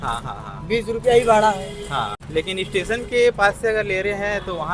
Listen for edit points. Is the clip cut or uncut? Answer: cut